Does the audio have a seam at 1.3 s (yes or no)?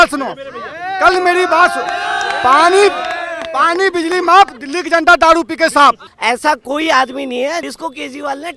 no